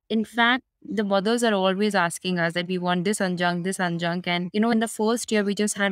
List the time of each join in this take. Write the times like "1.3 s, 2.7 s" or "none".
4.7 s